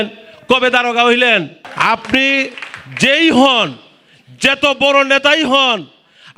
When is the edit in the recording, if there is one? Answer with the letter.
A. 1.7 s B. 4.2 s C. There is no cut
A